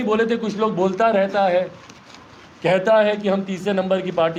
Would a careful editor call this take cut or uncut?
uncut